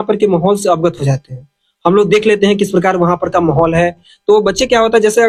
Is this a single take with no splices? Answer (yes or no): yes